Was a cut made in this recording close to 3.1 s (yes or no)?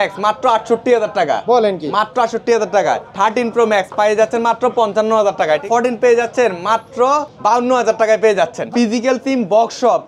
yes